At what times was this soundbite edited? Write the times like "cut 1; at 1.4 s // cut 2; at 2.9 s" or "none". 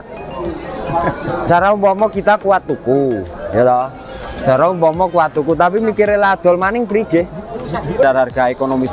cut 1; at 8.0 s

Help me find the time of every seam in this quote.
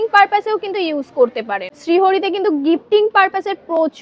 cut 1; at 1.5 s

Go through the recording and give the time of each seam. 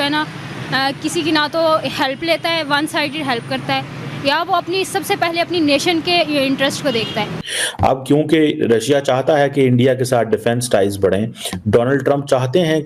cut 1; at 7.4 s

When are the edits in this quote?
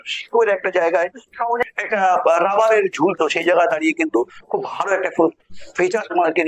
cut 1; at 1.6 s

